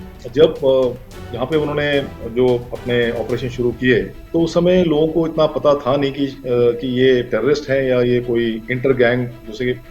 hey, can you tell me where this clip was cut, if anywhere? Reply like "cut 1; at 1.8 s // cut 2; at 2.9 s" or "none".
cut 1; at 4.2 s